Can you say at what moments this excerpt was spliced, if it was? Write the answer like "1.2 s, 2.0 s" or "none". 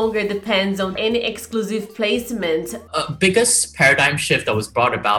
1.0 s, 2.8 s